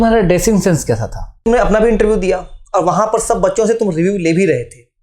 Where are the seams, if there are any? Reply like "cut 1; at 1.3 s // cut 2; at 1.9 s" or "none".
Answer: cut 1; at 1.2 s